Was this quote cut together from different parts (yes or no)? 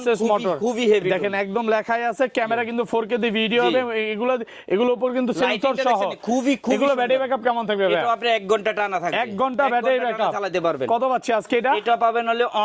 no